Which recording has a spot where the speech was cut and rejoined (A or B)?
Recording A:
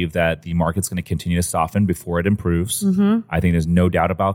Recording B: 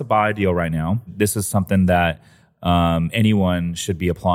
B